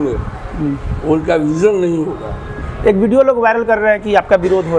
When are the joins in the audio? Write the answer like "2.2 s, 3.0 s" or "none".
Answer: 2.5 s